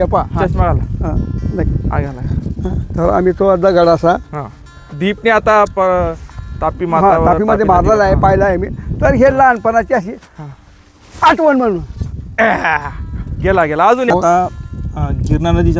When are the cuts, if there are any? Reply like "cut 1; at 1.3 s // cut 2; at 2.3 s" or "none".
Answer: cut 1; at 14.1 s